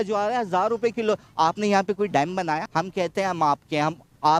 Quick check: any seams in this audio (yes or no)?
yes